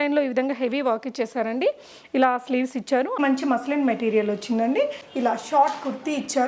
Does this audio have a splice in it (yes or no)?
yes